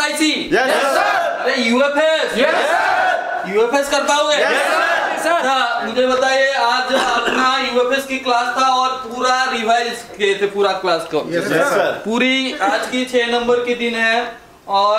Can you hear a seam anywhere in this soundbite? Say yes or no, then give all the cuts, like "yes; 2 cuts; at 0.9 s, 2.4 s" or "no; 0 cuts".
no; 0 cuts